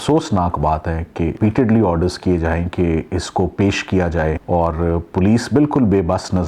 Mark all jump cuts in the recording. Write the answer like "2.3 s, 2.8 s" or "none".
1.4 s, 4.4 s

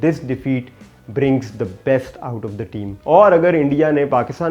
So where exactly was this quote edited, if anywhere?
3.0 s

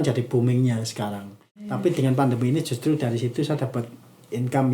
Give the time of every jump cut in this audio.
1.7 s

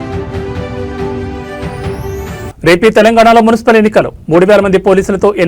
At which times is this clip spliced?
1.4 s, 2.4 s

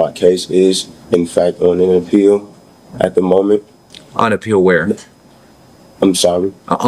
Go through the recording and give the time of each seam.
none

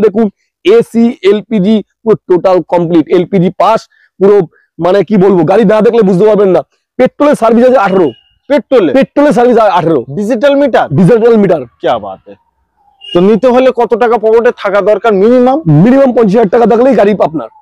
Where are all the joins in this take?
none

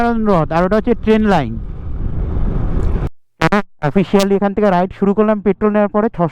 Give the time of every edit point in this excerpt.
3.1 s

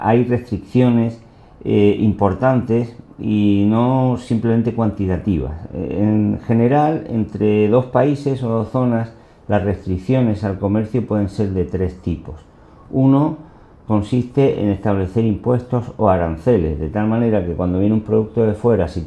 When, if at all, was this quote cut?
10.4 s

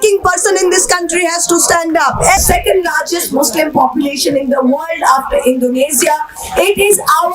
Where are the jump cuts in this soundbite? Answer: 2.4 s

